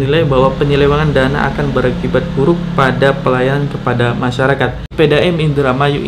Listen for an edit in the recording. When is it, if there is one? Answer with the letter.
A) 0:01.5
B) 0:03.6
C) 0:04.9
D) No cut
C